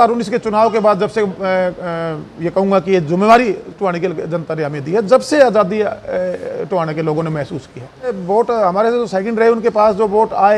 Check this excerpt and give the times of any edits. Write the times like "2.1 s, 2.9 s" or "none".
8.2 s